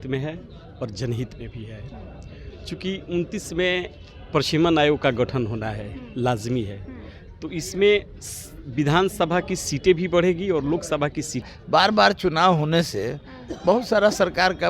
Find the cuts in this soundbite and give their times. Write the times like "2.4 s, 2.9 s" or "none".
11.4 s

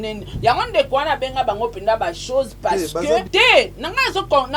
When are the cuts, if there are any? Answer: 3.3 s

